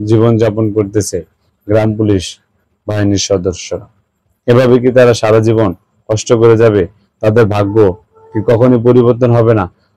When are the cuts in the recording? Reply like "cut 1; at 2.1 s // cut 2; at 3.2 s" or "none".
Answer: none